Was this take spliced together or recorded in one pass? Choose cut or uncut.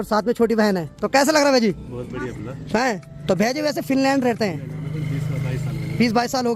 uncut